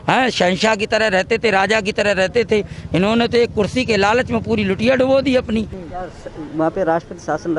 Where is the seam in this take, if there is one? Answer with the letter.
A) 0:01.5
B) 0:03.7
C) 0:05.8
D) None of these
C